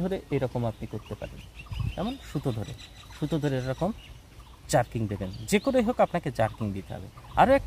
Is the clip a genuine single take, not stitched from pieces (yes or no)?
yes